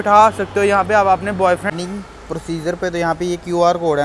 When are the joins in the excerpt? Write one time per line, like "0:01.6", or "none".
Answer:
0:01.7